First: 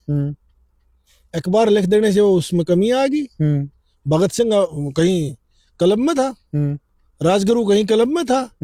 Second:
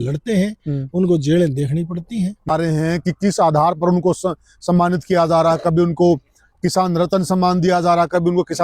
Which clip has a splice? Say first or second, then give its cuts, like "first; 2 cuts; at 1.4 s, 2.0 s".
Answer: second; 1 cut; at 2.5 s